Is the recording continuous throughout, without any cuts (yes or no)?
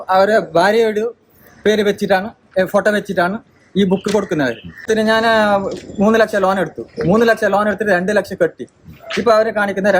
no